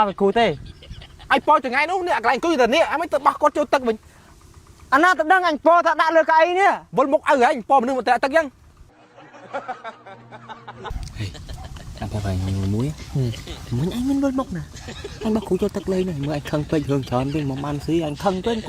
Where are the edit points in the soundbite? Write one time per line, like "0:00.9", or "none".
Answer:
0:10.9